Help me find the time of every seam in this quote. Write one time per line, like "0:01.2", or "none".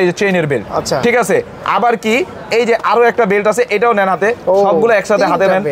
none